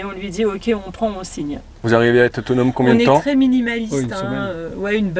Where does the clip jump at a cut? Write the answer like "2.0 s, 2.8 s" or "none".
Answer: 1.8 s